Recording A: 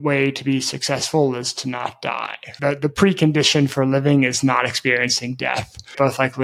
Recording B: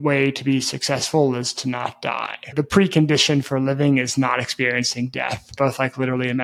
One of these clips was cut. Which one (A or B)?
B